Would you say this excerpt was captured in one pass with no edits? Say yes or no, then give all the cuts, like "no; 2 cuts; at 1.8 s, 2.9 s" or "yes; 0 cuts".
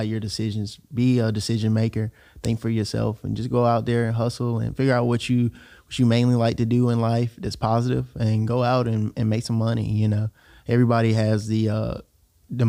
yes; 0 cuts